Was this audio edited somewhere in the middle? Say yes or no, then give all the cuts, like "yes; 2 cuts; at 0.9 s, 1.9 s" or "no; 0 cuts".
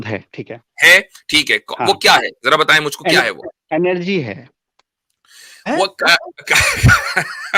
no; 0 cuts